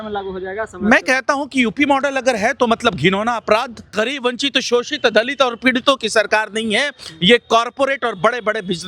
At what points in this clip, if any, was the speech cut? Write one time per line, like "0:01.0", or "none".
0:03.9